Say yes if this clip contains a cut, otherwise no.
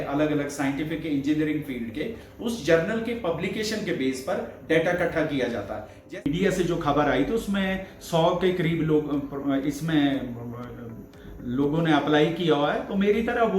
yes